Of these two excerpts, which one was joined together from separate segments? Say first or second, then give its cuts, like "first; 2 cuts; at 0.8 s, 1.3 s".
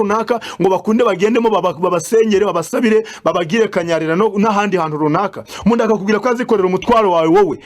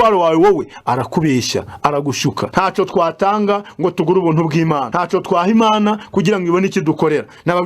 second; 2 cuts; at 2.4 s, 4.9 s